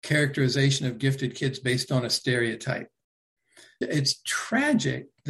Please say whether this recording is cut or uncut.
cut